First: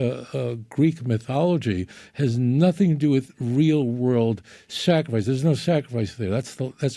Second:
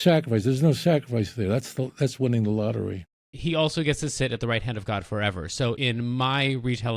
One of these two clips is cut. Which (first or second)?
second